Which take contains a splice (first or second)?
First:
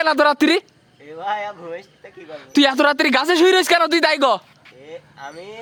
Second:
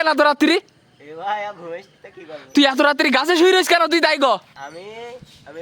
second